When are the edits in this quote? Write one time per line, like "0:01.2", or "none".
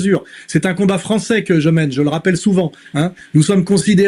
none

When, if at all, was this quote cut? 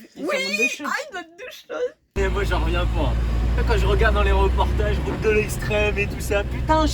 0:02.1

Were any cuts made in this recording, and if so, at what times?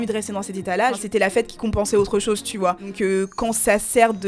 0:01.0
0:02.9

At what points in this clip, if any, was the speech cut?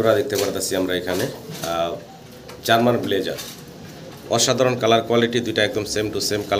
none

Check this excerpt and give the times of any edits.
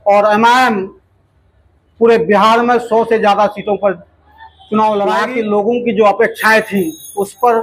0:05.1

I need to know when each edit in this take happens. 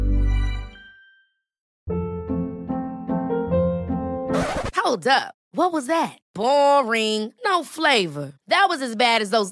0:01.4

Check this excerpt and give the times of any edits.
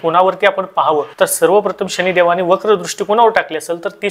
none

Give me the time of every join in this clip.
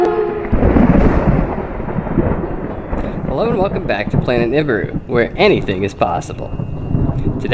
0:02.0

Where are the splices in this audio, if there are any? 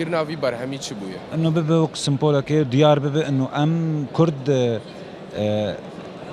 none

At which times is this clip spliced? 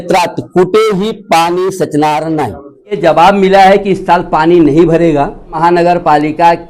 0:03.0
0:05.6

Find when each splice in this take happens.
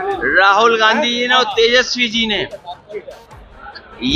none

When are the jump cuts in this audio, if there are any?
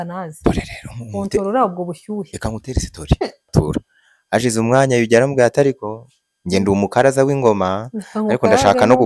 0:03.5

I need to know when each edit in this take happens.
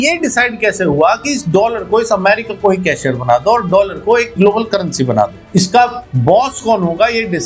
none

